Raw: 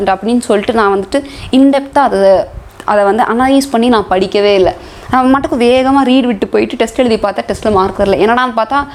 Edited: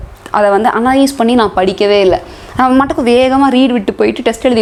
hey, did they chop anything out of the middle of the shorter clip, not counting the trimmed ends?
no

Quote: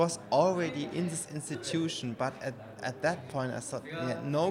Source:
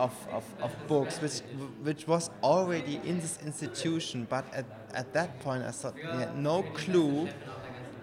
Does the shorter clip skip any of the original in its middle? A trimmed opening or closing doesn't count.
no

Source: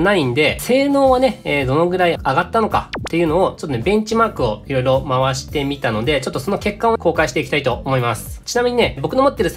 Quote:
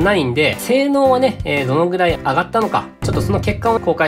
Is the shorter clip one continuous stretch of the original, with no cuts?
no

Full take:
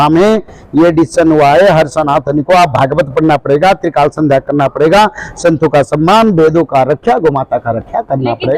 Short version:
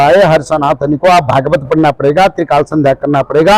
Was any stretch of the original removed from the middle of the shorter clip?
no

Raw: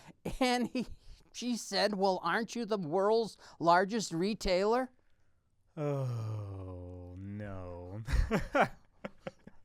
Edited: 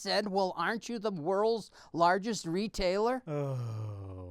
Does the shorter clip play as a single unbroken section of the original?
no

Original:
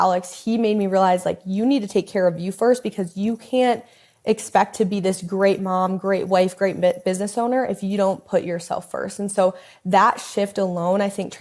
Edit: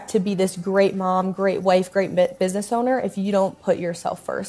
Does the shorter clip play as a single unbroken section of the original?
yes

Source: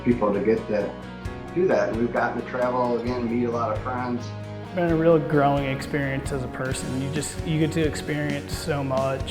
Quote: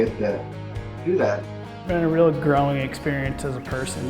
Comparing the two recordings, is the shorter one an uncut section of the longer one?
no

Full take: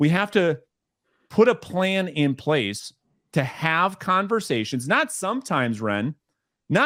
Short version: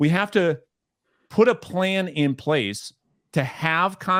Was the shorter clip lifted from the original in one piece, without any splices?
yes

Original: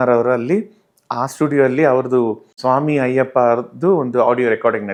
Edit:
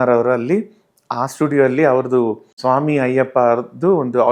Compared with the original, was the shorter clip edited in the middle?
no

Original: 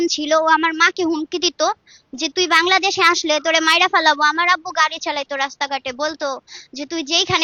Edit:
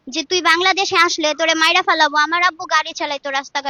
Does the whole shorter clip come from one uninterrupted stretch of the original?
yes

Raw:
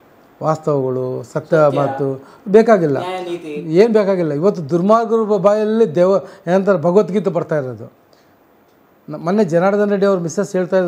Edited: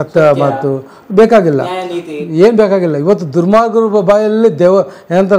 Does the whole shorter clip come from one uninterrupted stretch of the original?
yes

